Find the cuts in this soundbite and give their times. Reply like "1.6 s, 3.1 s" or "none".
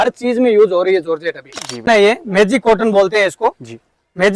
1.9 s